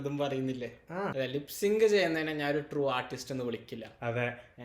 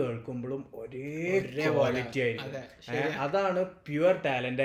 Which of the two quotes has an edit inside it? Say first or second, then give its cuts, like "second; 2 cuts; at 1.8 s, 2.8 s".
first; 1 cut; at 1.1 s